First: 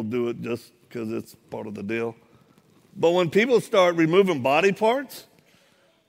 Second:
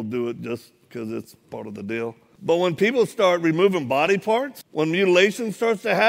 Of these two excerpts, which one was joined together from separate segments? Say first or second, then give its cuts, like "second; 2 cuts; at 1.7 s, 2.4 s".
second; 2 cuts; at 2.3 s, 4.6 s